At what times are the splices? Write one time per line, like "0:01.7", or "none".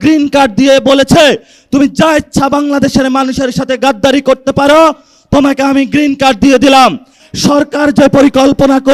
0:07.2